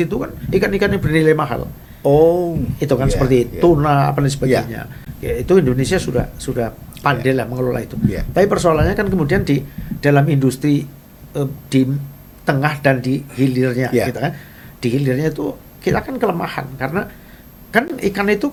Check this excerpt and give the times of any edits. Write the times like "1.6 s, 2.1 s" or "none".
none